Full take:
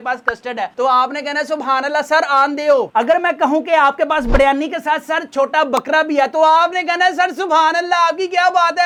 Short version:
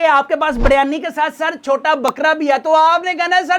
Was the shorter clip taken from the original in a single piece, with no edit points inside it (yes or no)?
yes